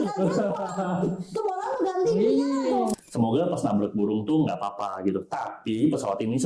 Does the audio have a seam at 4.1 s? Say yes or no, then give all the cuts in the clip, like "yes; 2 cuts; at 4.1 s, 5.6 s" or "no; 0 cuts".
no; 1 cut; at 2.9 s